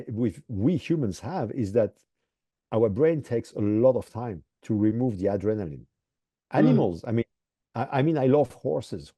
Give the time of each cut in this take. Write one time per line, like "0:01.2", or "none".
none